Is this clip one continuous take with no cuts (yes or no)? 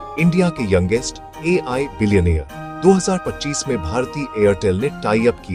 yes